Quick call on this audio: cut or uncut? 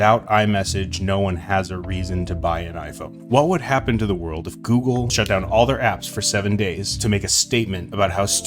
cut